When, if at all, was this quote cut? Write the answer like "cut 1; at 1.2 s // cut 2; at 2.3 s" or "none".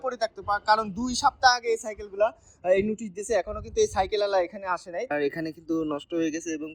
cut 1; at 5.1 s